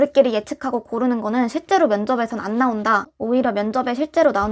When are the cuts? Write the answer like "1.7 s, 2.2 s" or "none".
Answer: 3.1 s